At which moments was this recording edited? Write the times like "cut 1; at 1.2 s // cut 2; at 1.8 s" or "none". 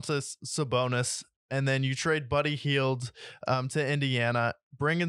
none